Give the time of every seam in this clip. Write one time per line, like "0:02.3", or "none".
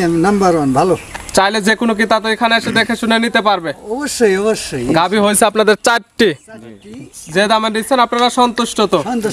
none